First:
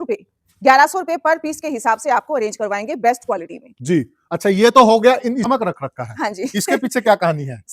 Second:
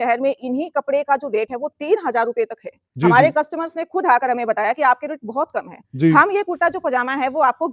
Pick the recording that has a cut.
first; 1 cut; at 5.5 s

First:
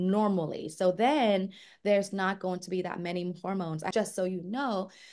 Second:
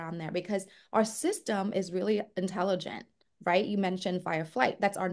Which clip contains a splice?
first; 1 cut; at 3.9 s

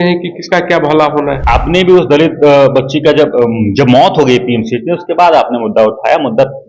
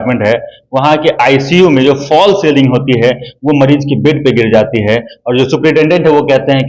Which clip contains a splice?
first; 1 cut; at 1.4 s

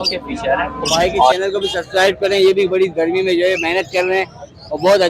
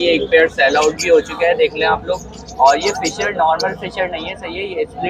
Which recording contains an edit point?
first; 1 cut; at 1.3 s

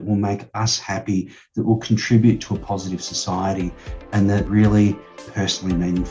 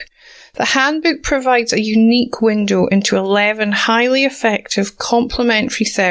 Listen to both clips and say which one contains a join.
first; 2 cuts; at 4.5 s, 5.2 s

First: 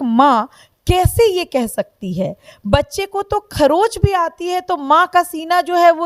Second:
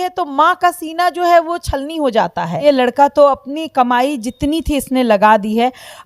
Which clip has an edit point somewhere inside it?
second; 1 cut; at 2.6 s

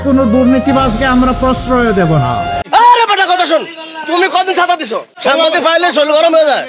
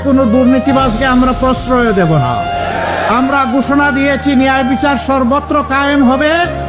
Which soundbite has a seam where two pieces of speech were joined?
first; 1 cut; at 2.6 s

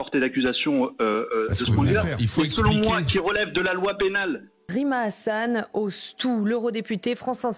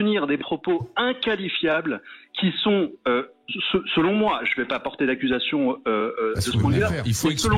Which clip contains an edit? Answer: first; 1 cut; at 4.6 s

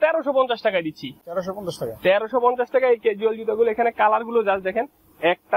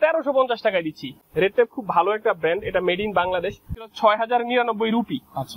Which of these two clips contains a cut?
second; 2 cuts; at 1.2 s, 3.8 s

